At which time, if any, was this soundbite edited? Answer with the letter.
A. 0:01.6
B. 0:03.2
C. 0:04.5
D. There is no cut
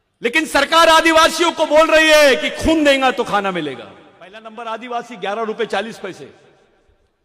C